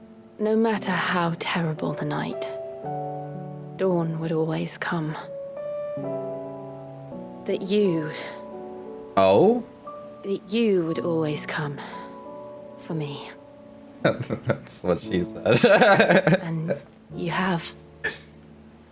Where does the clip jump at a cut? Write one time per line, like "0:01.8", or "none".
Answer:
0:03.7
0:07.2